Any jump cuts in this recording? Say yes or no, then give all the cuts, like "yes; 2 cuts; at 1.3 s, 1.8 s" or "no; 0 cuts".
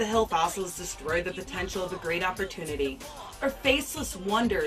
yes; 1 cut; at 1.9 s